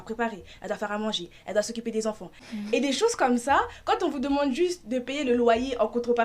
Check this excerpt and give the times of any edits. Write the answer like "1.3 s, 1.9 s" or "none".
2.4 s